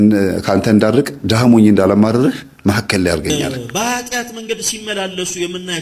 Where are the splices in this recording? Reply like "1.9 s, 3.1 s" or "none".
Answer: 3.4 s